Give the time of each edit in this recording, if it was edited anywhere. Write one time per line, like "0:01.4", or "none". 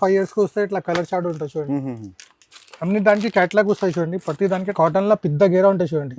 0:04.7